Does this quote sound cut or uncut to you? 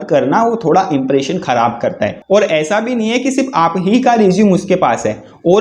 cut